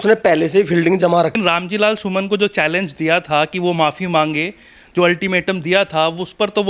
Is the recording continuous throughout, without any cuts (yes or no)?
no